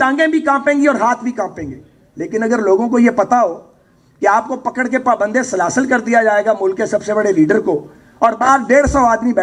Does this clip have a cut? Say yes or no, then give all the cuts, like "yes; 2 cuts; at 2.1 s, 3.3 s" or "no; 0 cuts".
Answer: no; 0 cuts